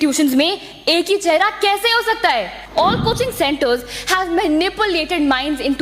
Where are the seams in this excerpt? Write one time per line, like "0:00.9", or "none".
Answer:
0:02.6

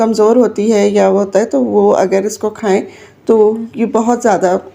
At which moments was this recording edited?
none

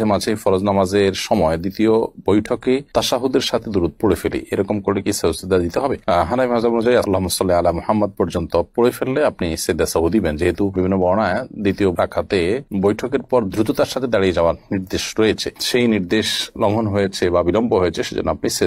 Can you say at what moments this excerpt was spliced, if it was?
none

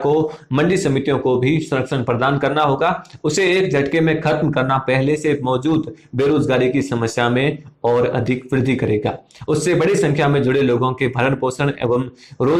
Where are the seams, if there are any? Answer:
none

